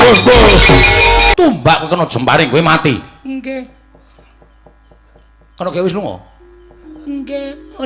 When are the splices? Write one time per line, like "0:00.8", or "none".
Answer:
0:01.3